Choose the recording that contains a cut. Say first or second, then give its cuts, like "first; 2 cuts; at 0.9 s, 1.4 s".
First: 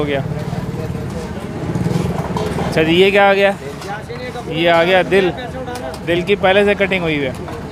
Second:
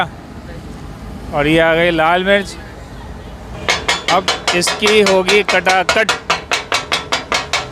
second; 1 cut; at 3.5 s